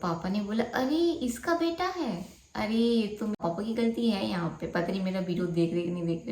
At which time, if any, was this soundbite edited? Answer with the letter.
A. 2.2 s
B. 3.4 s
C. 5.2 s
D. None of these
B